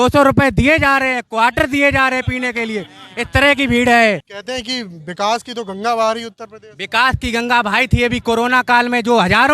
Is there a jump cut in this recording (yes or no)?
yes